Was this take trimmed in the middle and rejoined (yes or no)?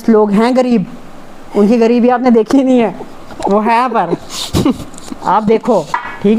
no